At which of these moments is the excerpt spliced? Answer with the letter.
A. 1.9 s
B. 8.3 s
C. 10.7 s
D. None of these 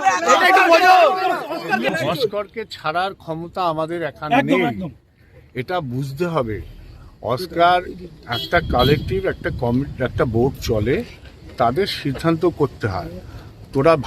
A